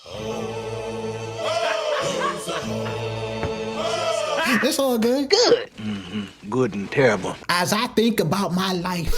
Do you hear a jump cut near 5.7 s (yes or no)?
no